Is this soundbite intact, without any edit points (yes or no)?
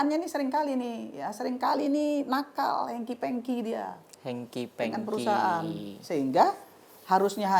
yes